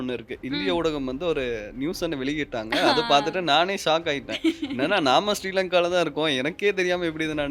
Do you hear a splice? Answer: no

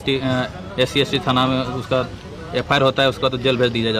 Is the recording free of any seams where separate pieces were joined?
yes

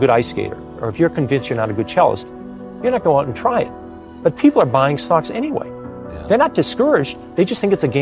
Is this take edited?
no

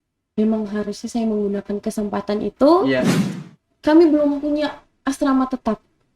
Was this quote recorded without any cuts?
no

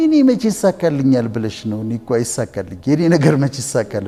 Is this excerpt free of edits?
yes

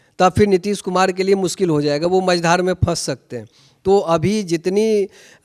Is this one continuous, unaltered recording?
yes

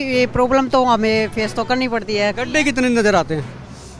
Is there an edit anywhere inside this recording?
yes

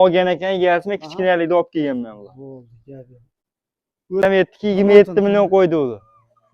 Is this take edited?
yes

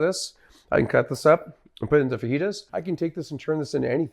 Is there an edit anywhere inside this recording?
yes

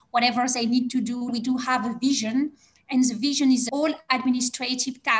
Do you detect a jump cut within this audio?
yes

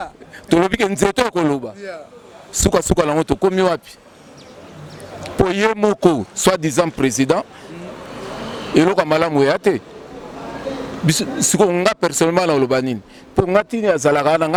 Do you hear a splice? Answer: no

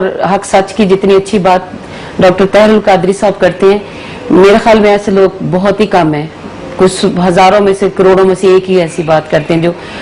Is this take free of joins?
no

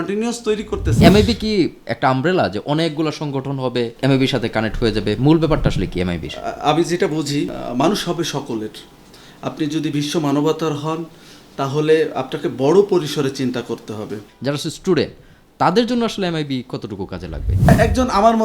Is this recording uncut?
no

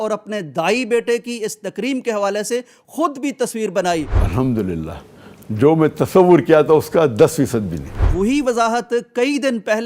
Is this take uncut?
no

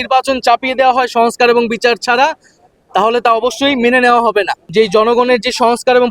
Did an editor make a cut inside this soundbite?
yes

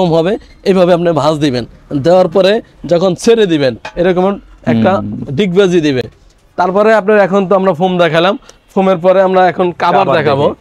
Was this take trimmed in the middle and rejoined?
no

